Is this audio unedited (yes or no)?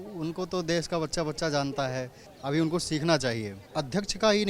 no